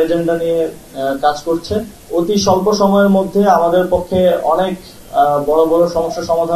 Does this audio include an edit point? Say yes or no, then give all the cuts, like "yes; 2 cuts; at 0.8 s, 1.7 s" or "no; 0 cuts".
yes; 1 cut; at 2.0 s